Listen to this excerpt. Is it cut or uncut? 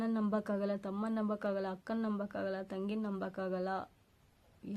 uncut